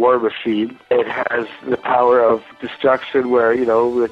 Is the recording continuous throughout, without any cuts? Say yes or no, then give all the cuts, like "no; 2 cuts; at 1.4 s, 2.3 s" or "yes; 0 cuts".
no; 2 cuts; at 0.9 s, 2.4 s